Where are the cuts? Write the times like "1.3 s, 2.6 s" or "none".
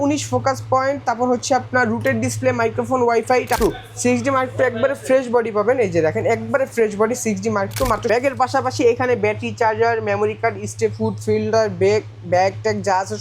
3.6 s, 8.0 s